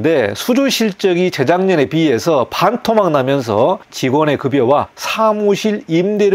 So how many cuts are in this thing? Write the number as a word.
two